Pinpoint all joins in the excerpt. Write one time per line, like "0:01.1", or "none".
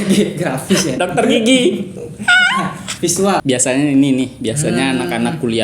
0:03.4